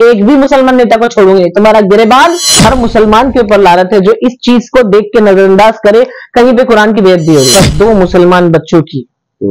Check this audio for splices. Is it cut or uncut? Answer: cut